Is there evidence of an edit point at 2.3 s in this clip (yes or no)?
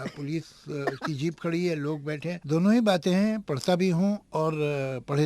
yes